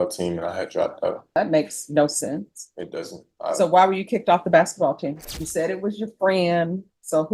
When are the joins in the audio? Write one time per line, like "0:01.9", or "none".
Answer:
0:01.4
0:05.1